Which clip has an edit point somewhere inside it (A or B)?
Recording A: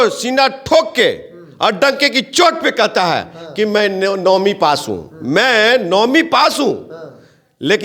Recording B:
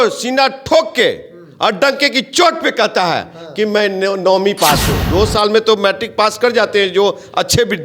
B